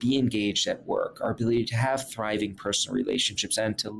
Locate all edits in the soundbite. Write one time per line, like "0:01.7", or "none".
none